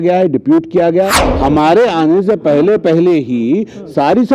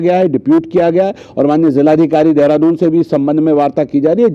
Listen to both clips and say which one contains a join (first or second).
first